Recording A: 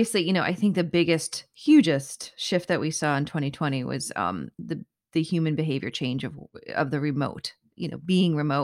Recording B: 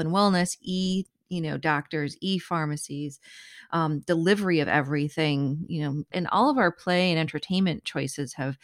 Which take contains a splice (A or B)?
B